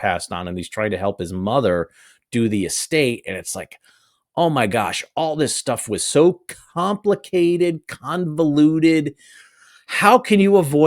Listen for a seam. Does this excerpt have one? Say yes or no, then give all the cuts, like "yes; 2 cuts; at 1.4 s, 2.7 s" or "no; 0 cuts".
no; 0 cuts